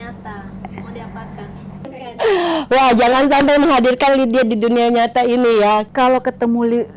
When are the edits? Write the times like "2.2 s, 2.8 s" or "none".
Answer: 1.7 s, 5.9 s